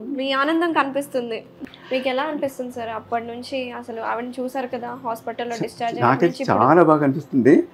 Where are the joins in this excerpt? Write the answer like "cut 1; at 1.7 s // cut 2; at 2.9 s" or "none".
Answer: cut 1; at 1.6 s